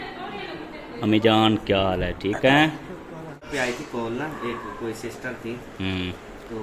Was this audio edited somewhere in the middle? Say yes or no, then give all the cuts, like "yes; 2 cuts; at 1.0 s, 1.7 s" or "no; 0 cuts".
yes; 1 cut; at 3.5 s